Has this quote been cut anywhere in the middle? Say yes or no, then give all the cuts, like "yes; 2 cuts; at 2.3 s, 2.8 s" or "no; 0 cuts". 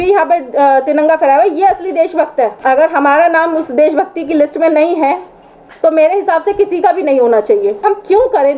yes; 2 cuts; at 2.6 s, 7.8 s